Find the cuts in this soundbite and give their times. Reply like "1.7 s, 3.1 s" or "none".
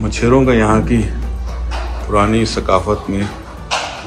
none